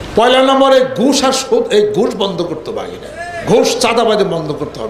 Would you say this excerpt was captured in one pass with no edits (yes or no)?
no